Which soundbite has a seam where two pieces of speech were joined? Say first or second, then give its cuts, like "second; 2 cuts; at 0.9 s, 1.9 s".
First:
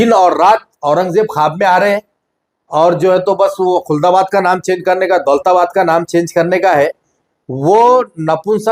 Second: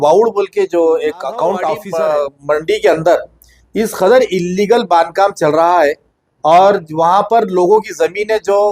second; 1 cut; at 1.8 s